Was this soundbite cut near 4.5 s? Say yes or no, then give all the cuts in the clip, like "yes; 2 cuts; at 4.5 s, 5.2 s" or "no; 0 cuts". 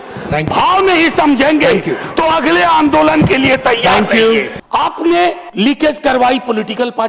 yes; 2 cuts; at 4.5 s, 5.4 s